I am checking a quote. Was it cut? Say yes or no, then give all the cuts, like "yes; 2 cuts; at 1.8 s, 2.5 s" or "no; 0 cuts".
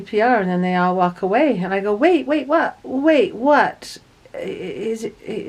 no; 0 cuts